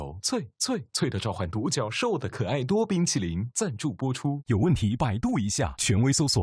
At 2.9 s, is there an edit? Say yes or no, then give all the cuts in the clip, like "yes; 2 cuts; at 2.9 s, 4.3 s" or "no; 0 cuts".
no; 0 cuts